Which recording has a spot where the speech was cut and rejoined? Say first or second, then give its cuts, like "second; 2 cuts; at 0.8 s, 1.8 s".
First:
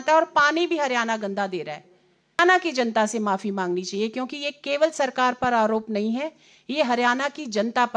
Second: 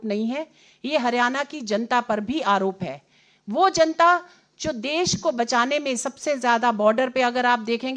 first; 1 cut; at 2.4 s